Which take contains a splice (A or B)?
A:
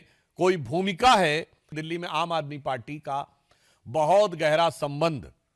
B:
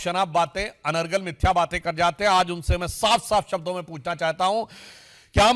A